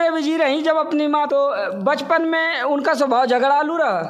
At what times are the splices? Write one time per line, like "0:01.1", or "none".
0:01.3